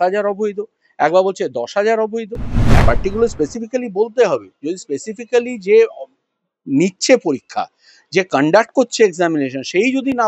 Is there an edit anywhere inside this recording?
yes; 1 cut; at 2.8 s

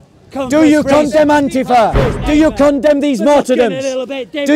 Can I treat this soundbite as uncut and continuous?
no; 1 cut; at 2.2 s

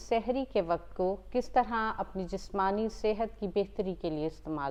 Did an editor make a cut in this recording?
no; 0 cuts

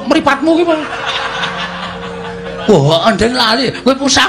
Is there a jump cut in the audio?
no; 0 cuts

